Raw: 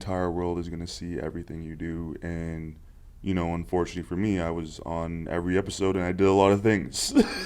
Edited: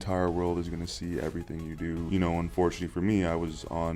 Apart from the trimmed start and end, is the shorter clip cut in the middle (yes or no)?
yes